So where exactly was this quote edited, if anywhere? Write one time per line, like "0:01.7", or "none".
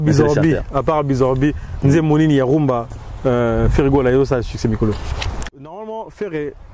0:05.6